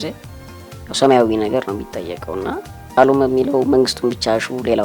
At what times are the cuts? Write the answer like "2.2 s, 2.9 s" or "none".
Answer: 3.0 s